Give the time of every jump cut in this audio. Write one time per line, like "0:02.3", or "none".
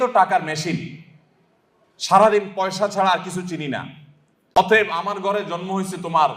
0:04.6

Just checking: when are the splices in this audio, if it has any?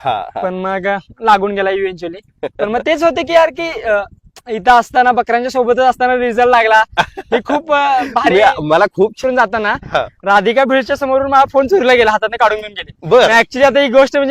0:09.2

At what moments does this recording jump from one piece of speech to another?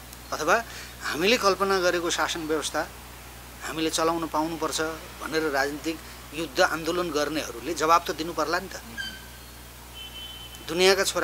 none

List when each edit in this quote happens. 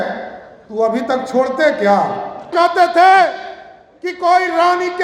0:02.5

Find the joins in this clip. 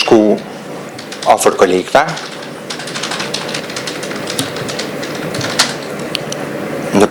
none

